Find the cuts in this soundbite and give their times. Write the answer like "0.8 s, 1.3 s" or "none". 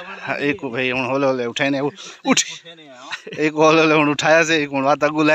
none